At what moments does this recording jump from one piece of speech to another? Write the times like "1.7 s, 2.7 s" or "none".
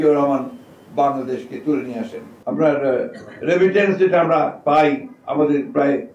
2.3 s